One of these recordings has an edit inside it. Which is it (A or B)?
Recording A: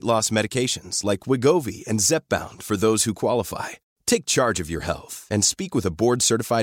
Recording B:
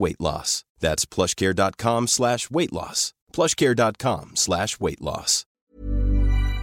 B